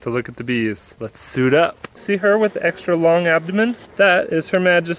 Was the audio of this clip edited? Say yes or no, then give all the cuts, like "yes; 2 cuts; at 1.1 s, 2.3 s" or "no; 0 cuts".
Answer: yes; 3 cuts; at 0.9 s, 2.0 s, 3.8 s